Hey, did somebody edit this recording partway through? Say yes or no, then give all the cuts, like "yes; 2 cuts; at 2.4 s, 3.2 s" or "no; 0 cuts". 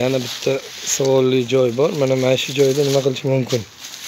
no; 0 cuts